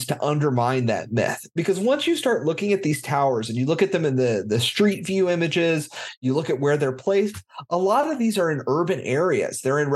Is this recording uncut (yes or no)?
yes